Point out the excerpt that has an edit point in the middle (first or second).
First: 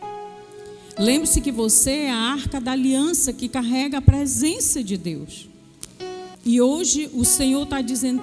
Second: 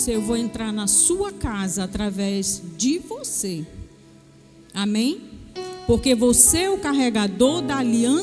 first